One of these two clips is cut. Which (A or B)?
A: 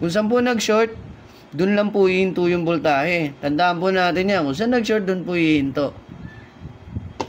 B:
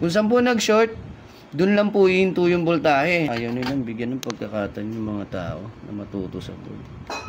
B